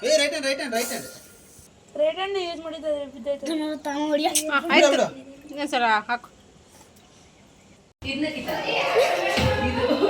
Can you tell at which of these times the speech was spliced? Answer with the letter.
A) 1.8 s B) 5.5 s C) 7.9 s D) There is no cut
C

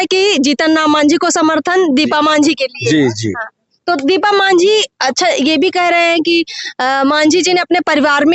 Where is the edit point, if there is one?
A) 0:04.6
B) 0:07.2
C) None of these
C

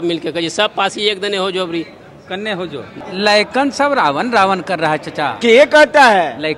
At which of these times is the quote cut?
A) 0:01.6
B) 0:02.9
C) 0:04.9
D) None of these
B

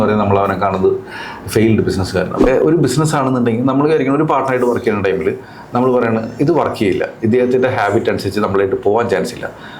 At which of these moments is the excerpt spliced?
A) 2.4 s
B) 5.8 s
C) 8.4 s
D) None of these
A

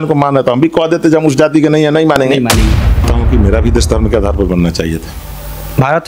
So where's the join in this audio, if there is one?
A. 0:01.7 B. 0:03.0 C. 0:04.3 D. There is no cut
B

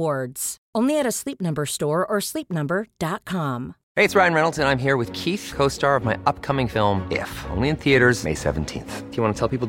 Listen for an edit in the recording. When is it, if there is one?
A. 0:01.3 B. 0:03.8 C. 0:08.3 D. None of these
B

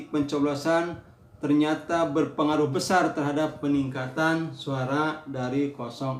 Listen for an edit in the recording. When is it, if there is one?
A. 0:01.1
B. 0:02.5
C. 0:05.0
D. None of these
D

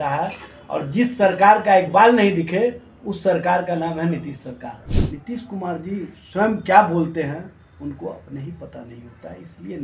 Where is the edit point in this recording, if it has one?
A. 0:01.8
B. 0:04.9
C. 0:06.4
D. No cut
B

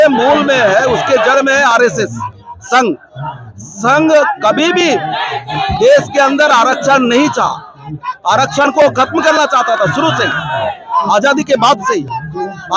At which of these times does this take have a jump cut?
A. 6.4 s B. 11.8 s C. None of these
C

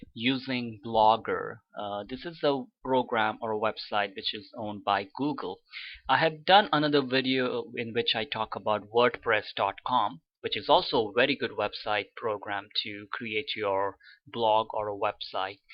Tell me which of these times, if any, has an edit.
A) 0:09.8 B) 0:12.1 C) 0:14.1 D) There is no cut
D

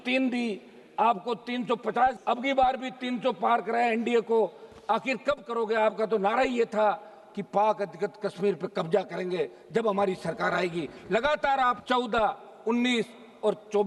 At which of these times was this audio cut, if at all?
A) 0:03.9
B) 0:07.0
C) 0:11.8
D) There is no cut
D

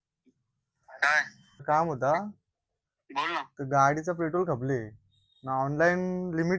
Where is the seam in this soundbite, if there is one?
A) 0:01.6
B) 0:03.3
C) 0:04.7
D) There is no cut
A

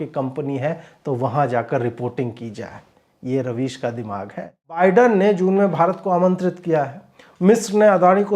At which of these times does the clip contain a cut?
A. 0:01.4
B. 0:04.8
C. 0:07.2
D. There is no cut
B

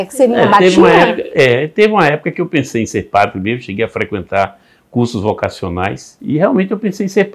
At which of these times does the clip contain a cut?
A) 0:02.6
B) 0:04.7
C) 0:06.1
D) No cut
C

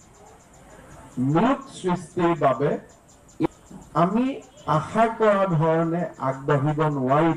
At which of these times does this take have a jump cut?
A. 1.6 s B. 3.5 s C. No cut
B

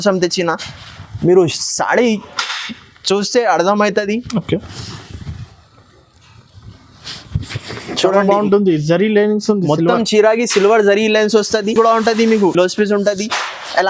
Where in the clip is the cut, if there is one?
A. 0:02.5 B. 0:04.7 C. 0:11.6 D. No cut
D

